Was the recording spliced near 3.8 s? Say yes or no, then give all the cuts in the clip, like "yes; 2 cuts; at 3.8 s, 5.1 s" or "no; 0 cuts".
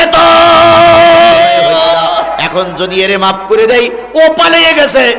no; 1 cut; at 2.4 s